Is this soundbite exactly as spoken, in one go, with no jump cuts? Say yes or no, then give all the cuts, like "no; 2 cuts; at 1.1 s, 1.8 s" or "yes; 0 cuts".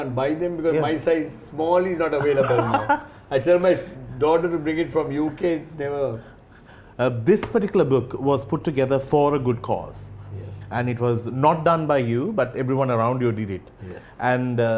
yes; 0 cuts